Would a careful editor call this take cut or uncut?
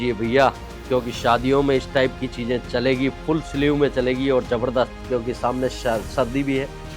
uncut